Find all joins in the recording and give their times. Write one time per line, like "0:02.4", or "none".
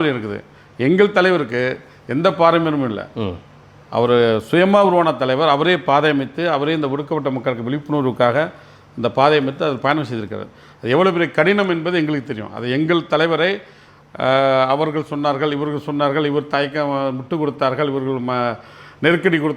none